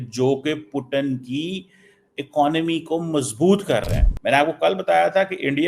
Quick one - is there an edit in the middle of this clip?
yes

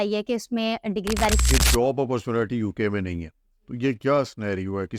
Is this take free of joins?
no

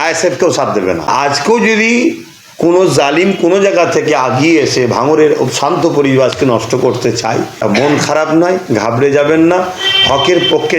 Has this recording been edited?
yes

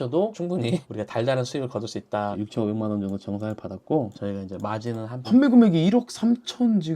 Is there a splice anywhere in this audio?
yes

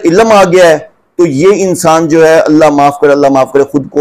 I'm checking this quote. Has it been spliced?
no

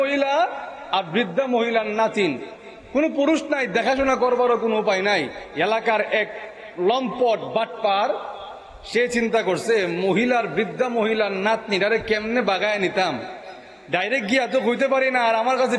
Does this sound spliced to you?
yes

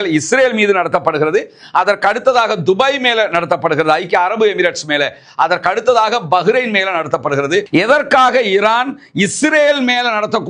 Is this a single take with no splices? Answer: no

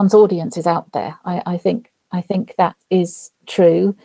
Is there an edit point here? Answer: yes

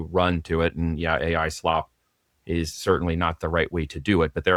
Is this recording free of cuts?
yes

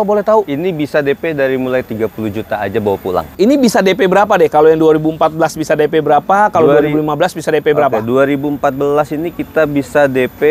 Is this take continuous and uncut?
no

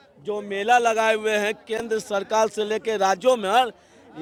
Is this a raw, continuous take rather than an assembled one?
yes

